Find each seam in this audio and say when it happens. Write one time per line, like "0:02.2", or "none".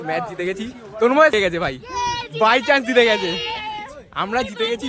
0:01.3